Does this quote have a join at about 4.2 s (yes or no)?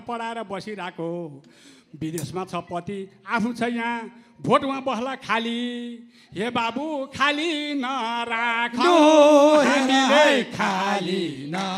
no